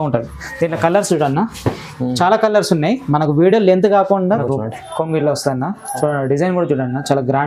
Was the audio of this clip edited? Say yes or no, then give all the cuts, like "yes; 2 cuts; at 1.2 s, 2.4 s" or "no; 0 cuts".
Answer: yes; 1 cut; at 4.4 s